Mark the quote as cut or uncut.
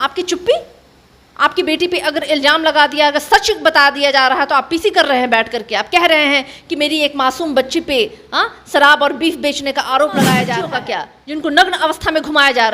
cut